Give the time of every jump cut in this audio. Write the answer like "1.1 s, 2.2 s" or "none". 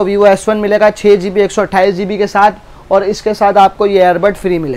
none